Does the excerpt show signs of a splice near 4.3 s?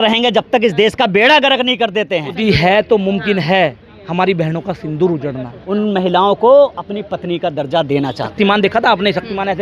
no; 3 cuts; at 2.3 s, 5.6 s, 8.3 s

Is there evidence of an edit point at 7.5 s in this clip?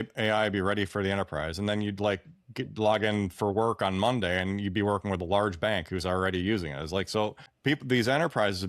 yes; 1 cut; at 7.5 s

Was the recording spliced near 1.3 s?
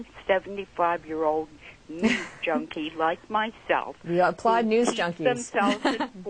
yes; 1 cut; at 1.3 s

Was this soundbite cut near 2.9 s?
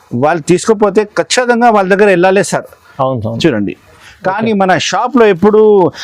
no; 1 cut; at 4.1 s

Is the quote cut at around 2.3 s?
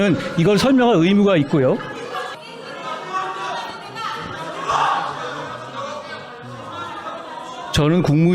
yes; 1 cut; at 2.3 s

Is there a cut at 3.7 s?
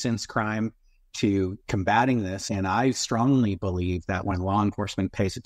no; 1 cut; at 2.4 s

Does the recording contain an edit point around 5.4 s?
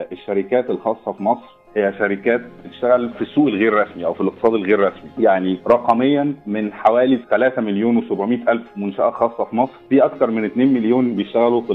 yes; 4 cuts; at 3.2 s, 5.4 s, 6.4 s, 9.8 s

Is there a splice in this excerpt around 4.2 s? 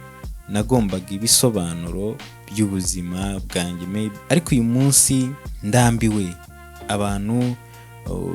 yes; 2 cuts; at 4.2 s, 5.5 s

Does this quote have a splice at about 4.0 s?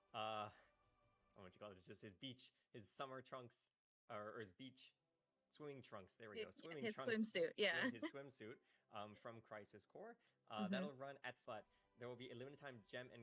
no; 1 cut; at 11.4 s

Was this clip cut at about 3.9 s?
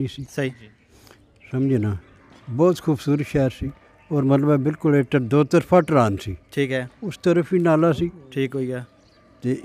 no; 0 cuts

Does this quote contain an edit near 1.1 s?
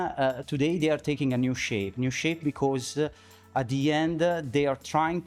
no; 0 cuts

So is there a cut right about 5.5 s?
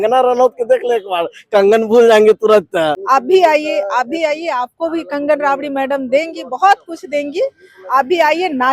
no; 1 cut; at 3.0 s

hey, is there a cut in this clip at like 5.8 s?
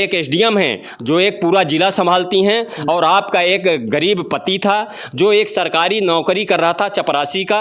no; 0 cuts

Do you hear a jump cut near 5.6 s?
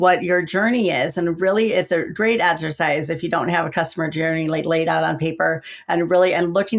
no; 0 cuts

